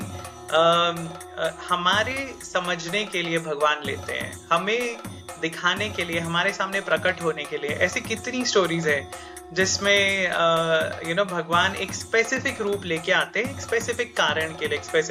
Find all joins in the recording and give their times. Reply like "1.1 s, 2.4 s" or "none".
none